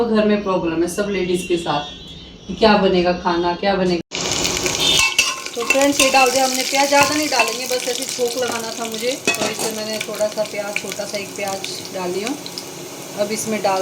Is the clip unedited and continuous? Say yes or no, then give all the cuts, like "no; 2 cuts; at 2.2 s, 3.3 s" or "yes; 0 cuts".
no; 1 cut; at 4.0 s